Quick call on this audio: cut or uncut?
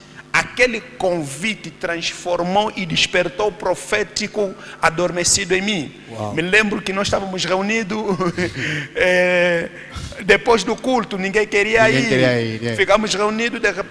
uncut